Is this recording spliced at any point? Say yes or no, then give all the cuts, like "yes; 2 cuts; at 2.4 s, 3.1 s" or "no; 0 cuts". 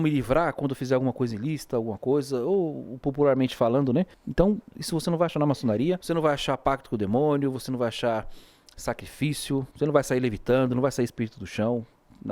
yes; 3 cuts; at 4.2 s, 6.0 s, 9.7 s